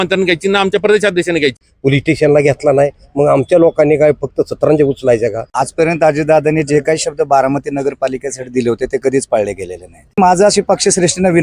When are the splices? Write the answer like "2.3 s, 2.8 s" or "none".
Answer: 1.7 s, 5.4 s, 10.2 s